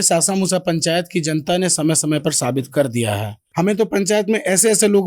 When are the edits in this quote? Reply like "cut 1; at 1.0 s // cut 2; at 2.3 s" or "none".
cut 1; at 3.3 s

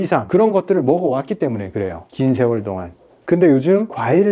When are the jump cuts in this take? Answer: cut 1; at 3.2 s

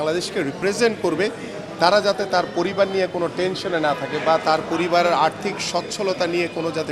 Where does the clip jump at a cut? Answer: none

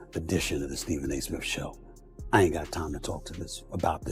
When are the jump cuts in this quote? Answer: none

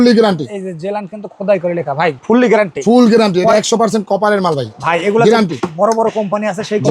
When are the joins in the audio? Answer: none

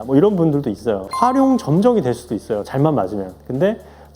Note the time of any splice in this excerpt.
cut 1; at 1.1 s

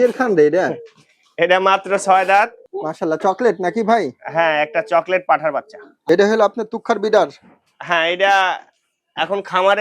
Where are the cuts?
cut 1; at 2.7 s // cut 2; at 5.9 s

